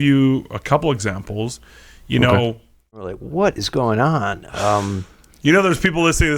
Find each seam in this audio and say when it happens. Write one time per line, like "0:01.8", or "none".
0:03.0